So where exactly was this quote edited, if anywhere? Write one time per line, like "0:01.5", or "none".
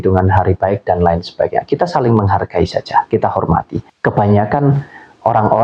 0:03.8